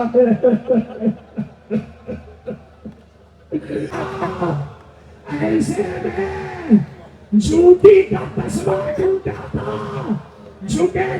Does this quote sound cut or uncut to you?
cut